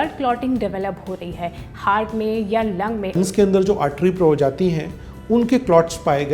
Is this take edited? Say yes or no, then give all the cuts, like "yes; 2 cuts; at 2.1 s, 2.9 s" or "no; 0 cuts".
yes; 1 cut; at 3.2 s